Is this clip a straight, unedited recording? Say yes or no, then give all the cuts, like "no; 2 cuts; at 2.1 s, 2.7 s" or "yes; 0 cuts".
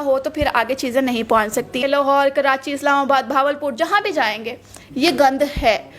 no; 1 cut; at 1.8 s